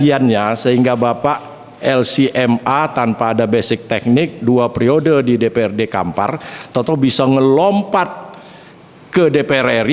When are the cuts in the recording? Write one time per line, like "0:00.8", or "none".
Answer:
none